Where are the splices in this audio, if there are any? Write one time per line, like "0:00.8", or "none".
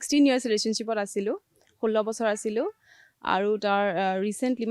none